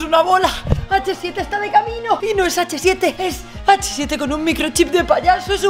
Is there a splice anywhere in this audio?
yes; 2 cuts; at 2.2 s, 3.2 s

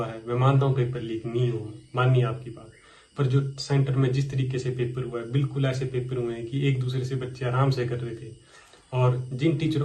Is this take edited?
no; 0 cuts

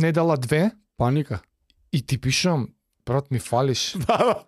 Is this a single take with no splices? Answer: yes; 0 cuts

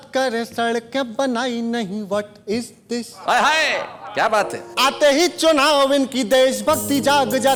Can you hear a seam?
no; 0 cuts

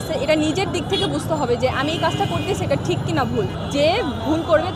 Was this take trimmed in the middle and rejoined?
yes; 1 cut; at 3.6 s

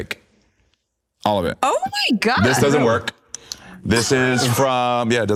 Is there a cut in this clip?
no; 0 cuts

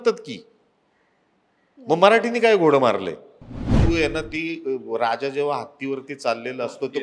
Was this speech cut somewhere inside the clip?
yes; 1 cut; at 3.8 s

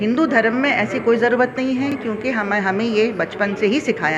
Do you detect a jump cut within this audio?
no; 0 cuts

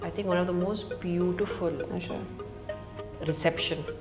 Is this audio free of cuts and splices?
yes; 0 cuts

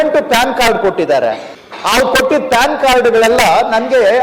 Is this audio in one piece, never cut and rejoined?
no; 1 cut; at 1.5 s

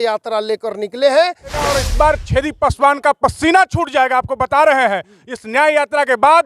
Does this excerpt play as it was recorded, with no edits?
no; 1 cut; at 1.8 s

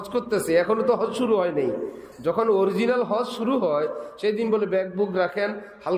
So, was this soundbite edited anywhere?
no; 0 cuts

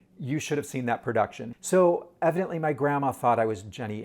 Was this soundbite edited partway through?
yes; 1 cut; at 1.5 s

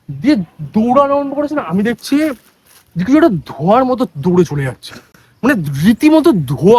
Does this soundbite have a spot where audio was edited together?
no; 0 cuts

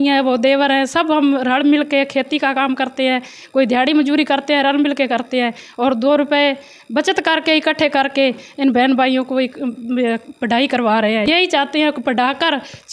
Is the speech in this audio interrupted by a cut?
yes; 1 cut; at 11.3 s

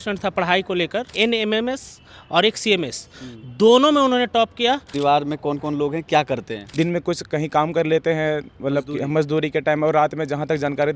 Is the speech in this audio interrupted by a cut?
yes; 3 cuts; at 1.1 s, 4.9 s, 6.6 s

